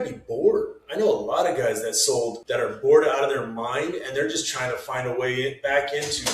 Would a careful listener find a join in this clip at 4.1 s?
no; 1 cut; at 2.4 s

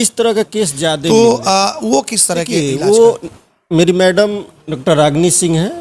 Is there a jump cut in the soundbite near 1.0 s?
yes; 2 cuts; at 1.0 s, 2.5 s

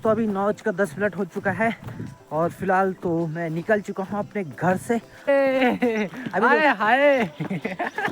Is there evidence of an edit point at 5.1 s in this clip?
yes; 1 cut; at 5.1 s

